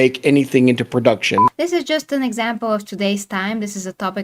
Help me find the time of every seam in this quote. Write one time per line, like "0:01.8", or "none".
0:01.5